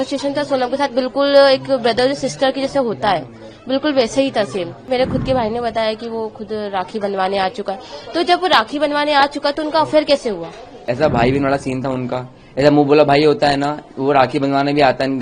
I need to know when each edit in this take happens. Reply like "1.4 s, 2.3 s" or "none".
4.8 s, 10.8 s